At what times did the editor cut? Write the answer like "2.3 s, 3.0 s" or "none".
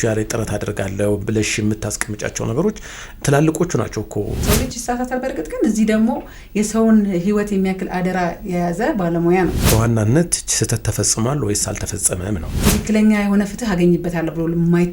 4.5 s, 9.6 s, 12.5 s